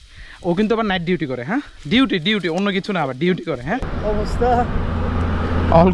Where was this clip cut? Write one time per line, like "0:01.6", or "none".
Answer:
0:03.9